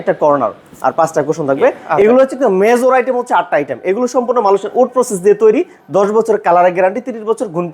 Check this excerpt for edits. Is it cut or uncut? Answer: cut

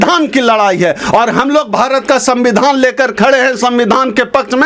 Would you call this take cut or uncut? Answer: uncut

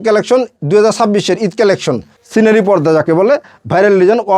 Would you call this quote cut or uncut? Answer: cut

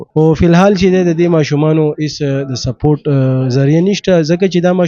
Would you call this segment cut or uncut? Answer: uncut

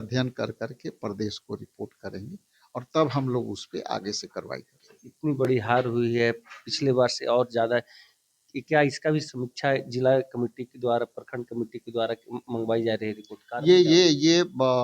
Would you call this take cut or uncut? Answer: uncut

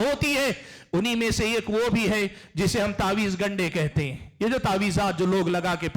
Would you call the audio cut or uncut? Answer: uncut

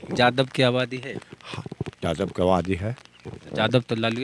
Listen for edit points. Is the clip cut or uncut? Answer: uncut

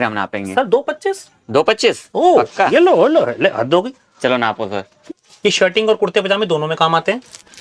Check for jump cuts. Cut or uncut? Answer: cut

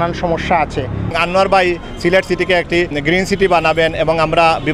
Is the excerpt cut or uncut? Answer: cut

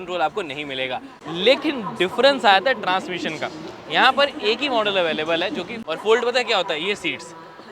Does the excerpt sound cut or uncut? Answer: cut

